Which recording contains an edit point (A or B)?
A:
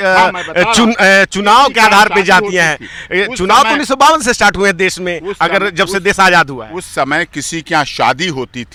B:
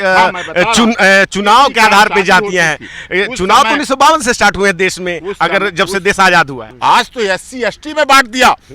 B